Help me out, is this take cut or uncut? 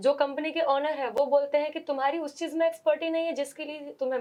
uncut